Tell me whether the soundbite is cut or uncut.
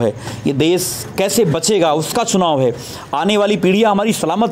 uncut